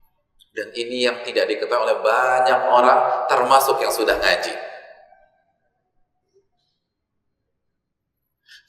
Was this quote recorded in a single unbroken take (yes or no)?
yes